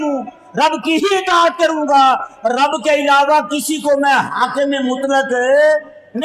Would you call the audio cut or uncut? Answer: uncut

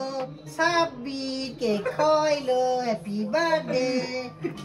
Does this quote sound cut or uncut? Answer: uncut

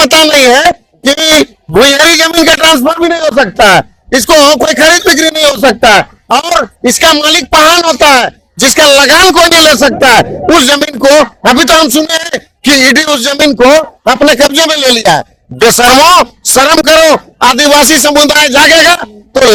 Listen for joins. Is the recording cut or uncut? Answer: uncut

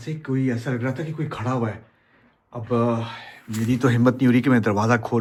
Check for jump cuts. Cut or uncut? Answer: uncut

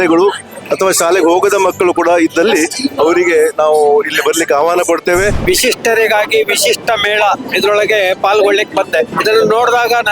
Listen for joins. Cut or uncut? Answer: cut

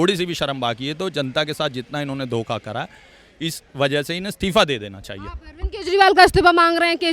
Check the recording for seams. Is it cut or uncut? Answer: uncut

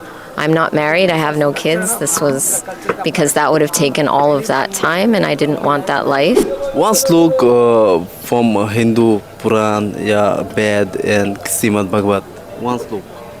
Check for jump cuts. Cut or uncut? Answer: cut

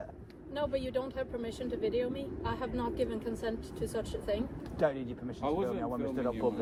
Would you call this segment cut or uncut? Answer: uncut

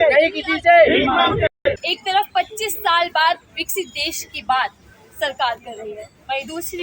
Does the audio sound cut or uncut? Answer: cut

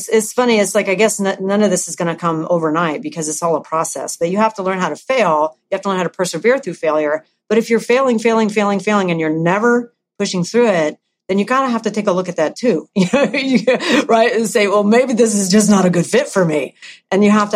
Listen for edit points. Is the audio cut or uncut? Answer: uncut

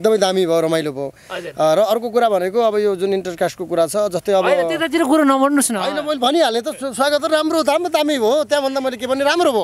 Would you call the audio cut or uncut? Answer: uncut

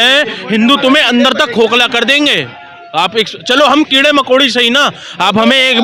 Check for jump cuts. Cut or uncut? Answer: uncut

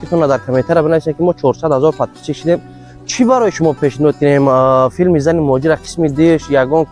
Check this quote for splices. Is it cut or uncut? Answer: uncut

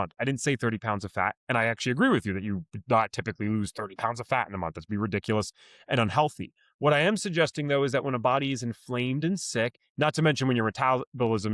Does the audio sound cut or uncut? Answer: uncut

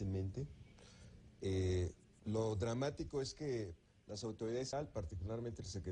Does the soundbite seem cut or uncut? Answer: uncut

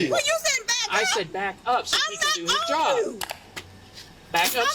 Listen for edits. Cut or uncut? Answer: uncut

